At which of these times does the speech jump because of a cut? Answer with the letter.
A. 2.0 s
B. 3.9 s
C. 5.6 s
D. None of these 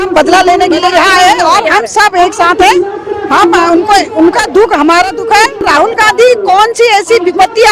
C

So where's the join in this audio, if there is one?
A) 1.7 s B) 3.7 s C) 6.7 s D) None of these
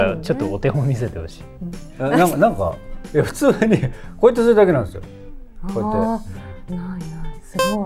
D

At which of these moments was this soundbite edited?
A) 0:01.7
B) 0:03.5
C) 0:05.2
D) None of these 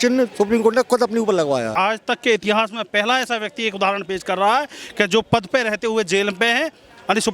A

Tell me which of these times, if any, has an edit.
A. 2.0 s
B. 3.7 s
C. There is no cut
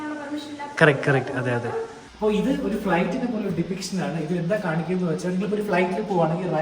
A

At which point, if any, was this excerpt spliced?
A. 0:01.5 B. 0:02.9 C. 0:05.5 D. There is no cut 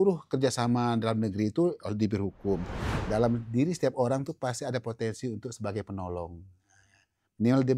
B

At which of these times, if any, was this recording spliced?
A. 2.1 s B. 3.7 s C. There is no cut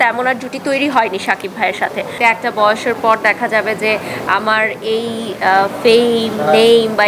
A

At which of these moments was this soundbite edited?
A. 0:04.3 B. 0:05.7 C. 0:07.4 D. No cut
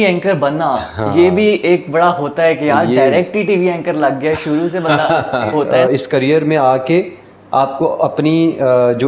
B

